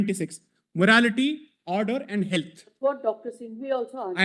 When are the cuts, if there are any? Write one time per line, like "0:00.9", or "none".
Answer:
none